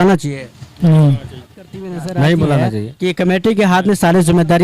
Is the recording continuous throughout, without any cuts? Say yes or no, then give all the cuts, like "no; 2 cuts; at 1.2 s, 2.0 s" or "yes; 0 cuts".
no; 1 cut; at 3.0 s